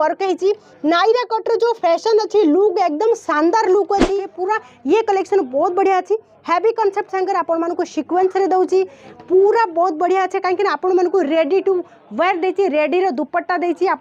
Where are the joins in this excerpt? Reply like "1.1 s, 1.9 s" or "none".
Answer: 4.3 s